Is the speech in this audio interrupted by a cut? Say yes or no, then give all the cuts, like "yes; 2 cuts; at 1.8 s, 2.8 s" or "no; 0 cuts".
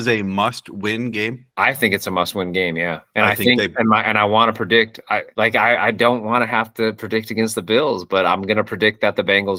no; 0 cuts